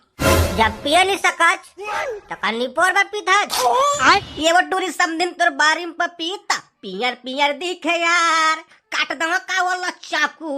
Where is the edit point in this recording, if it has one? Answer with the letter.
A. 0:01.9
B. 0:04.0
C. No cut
B